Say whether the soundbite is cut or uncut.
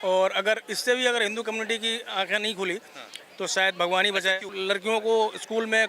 cut